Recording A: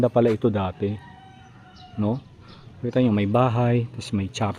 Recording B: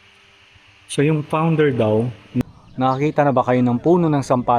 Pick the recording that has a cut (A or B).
B